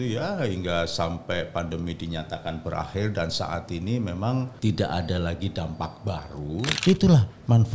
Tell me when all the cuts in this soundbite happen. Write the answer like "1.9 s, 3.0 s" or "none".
4.5 s, 6.7 s

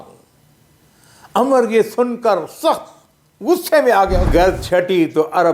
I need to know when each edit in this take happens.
4.3 s

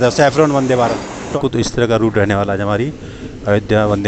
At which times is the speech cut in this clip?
1.3 s

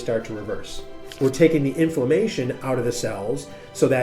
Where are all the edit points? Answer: 1.2 s

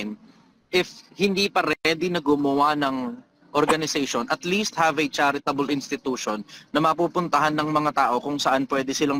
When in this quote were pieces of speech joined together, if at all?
none

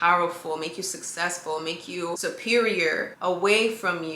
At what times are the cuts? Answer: 2.2 s, 3.1 s

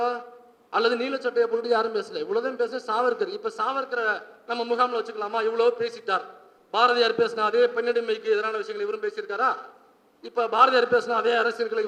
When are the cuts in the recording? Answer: none

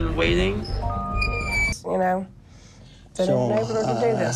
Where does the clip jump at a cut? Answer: 1.7 s

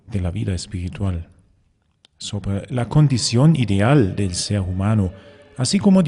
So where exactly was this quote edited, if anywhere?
2.9 s

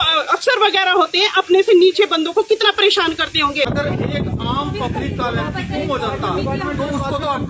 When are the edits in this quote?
3.7 s

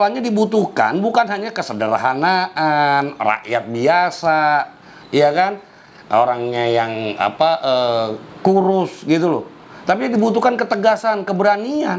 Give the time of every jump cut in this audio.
none

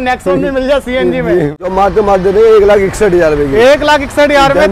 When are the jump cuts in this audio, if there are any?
1.6 s

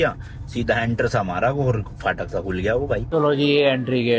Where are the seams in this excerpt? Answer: 3.0 s

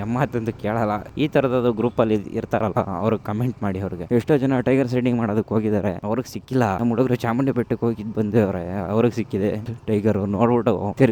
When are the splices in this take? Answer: 4.0 s

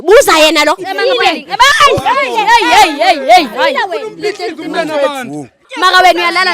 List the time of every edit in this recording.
0.9 s, 5.6 s

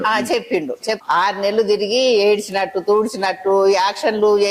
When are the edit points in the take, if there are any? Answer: 1.0 s

